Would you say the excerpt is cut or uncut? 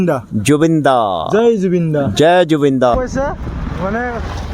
cut